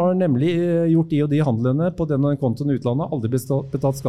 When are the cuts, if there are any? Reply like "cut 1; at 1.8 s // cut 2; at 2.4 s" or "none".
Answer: none